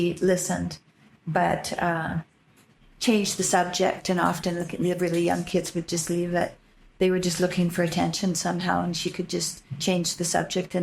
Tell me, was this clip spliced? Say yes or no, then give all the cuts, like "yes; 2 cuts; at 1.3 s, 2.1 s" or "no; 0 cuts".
no; 0 cuts